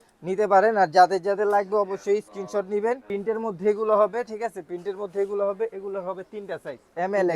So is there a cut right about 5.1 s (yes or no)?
no